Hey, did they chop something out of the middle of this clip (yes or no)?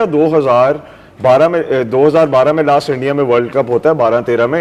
no